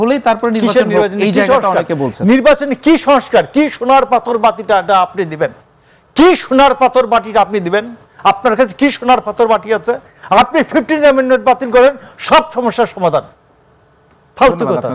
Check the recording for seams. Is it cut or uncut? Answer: uncut